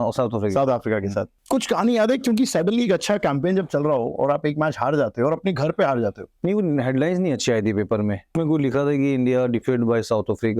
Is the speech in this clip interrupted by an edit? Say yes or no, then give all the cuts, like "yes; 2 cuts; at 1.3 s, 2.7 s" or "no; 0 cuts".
yes; 3 cuts; at 1.4 s, 6.3 s, 8.3 s